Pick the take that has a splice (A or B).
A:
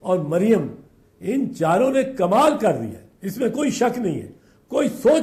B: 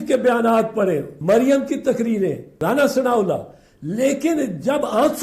B